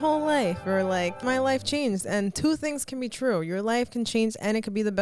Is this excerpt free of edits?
no; 1 cut; at 1.2 s

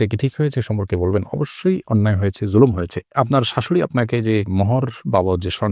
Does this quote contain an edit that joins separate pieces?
no; 0 cuts

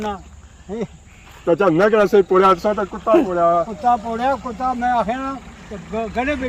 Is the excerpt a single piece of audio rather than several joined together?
yes; 0 cuts

